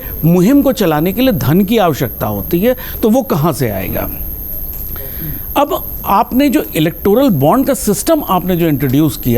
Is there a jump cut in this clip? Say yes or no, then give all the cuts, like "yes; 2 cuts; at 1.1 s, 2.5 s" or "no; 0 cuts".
no; 0 cuts